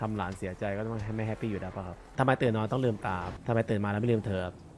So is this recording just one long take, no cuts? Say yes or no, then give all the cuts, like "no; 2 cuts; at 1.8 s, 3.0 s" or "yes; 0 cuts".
no; 2 cuts; at 2.1 s, 3.3 s